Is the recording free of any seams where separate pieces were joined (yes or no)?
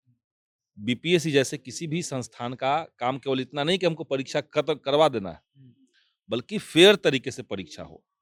yes